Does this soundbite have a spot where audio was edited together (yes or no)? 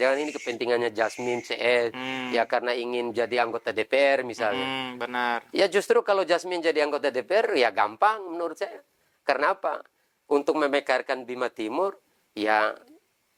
no